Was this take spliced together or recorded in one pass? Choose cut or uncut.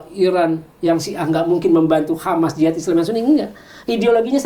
uncut